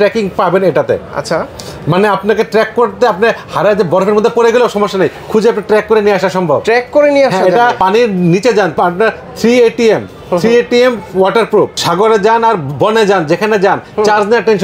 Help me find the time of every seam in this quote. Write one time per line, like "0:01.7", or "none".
none